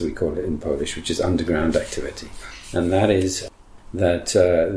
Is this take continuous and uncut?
no; 1 cut; at 3.4 s

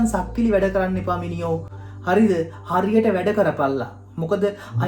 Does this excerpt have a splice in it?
no; 0 cuts

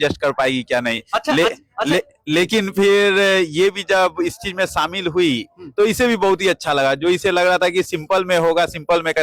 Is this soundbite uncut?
yes; 0 cuts

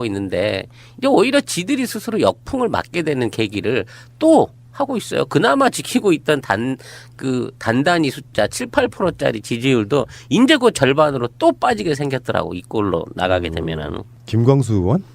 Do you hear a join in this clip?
yes; 1 cut; at 2.5 s

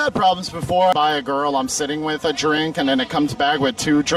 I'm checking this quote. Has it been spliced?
yes; 1 cut; at 0.9 s

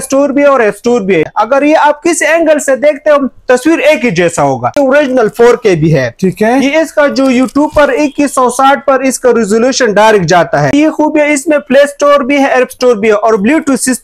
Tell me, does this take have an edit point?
yes; 3 cuts; at 1.3 s, 4.7 s, 10.7 s

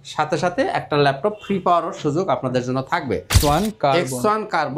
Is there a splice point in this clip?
yes; 1 cut; at 3.3 s

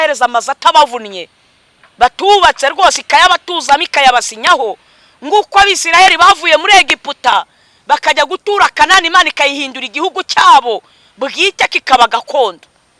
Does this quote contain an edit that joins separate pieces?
no; 0 cuts

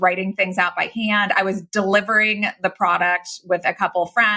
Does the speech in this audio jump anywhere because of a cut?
no; 0 cuts

